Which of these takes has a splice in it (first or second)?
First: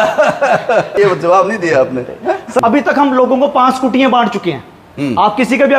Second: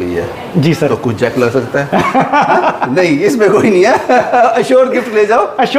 first